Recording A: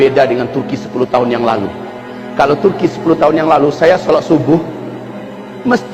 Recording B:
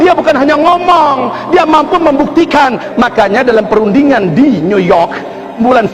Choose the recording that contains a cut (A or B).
B